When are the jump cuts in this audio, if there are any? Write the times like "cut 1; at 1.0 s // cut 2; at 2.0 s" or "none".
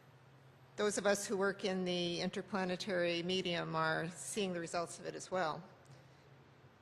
none